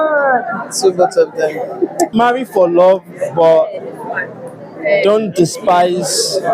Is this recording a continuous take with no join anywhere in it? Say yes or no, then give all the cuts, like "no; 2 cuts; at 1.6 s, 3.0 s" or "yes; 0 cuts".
no; 1 cut; at 2.1 s